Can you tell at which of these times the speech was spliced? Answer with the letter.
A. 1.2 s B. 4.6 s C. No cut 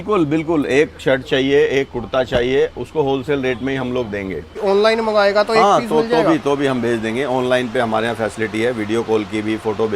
B